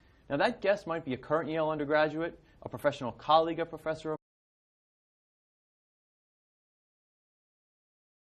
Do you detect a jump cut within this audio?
no; 0 cuts

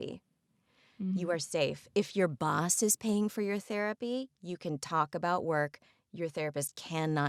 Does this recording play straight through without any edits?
yes; 0 cuts

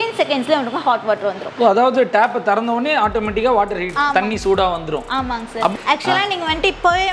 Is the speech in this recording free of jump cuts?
no; 2 cuts; at 3.9 s, 5.7 s

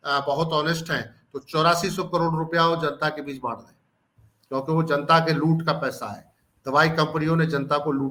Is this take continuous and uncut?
yes; 0 cuts

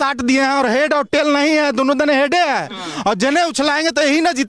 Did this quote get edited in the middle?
no; 0 cuts

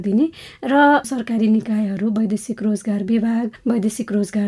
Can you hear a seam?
yes; 2 cuts; at 1.1 s, 3.5 s

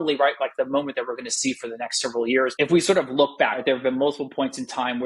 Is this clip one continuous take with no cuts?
no; 2 cuts; at 2.5 s, 3.6 s

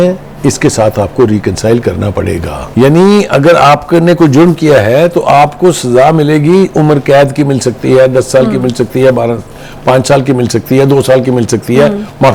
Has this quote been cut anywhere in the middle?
yes; 1 cut; at 2.6 s

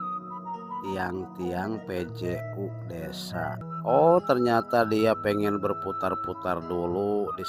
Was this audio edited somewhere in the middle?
yes; 1 cut; at 3.6 s

